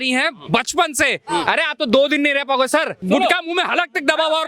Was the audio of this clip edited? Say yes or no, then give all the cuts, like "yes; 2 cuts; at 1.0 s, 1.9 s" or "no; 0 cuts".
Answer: yes; 1 cut; at 2.9 s